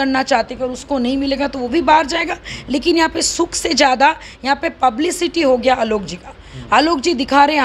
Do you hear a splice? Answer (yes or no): no